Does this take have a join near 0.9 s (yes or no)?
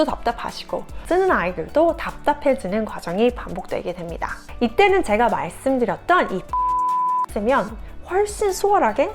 yes